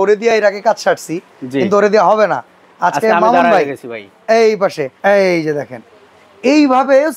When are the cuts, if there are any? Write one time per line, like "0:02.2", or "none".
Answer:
0:04.9